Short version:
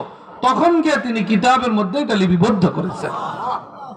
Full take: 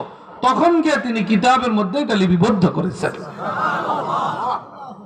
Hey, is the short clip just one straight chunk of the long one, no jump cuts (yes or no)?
no